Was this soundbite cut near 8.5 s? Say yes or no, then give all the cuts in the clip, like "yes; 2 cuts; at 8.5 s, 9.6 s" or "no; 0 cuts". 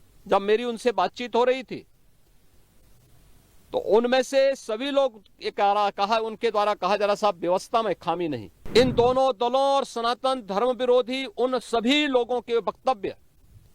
yes; 1 cut; at 8.5 s